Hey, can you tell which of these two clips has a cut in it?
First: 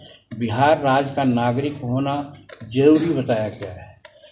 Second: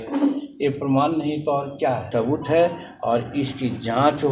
second; 1 cut; at 2.1 s

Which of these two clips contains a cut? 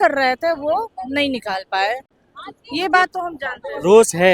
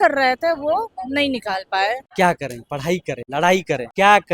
second; 1 cut; at 2.1 s

